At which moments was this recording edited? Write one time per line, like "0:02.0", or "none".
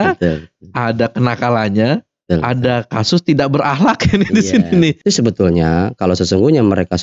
0:05.0